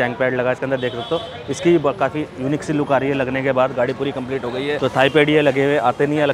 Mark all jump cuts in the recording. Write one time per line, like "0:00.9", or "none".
none